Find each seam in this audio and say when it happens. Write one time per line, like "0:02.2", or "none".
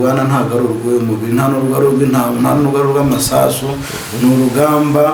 none